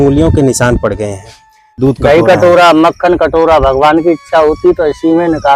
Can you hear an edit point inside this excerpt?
yes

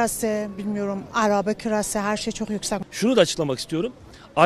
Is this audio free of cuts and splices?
no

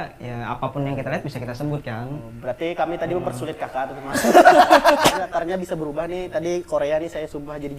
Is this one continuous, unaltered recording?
no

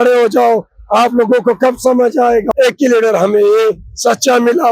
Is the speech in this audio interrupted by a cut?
yes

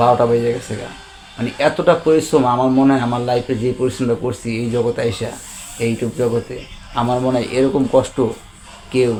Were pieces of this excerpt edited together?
no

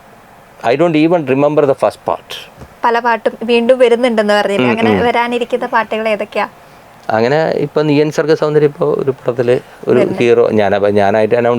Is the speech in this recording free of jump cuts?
no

